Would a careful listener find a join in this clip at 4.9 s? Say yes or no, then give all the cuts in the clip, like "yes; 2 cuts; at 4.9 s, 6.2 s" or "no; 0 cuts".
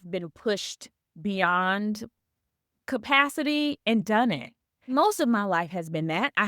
yes; 1 cut; at 4.9 s